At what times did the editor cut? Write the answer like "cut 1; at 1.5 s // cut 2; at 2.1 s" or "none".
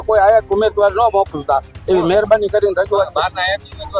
none